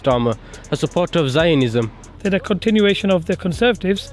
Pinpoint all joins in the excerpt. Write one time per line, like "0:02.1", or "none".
0:02.0